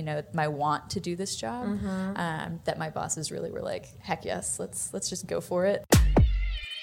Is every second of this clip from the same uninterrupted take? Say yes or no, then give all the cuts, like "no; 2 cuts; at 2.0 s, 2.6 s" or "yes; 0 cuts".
no; 1 cut; at 5.8 s